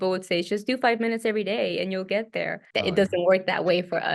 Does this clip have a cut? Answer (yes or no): yes